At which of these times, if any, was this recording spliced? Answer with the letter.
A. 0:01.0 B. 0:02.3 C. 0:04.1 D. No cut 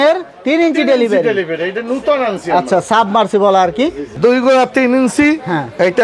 C